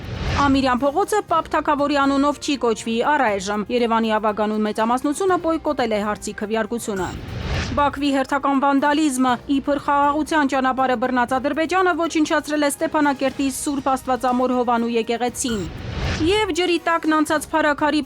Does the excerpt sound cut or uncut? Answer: cut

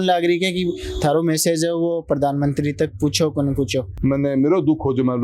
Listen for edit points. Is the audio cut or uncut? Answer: cut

